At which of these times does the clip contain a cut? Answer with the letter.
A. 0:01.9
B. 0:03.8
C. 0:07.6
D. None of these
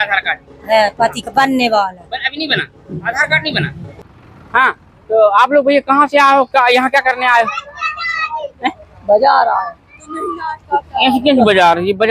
B